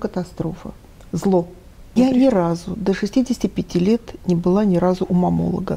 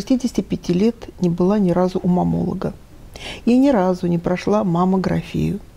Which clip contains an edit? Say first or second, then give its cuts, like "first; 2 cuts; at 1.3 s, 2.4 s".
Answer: first; 1 cut; at 2.0 s